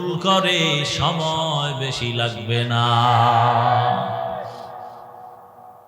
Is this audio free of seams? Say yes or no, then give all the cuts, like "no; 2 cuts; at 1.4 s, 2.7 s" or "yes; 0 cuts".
yes; 0 cuts